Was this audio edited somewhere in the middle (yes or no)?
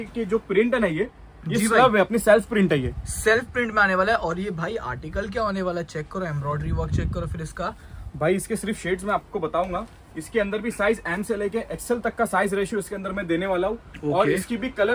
no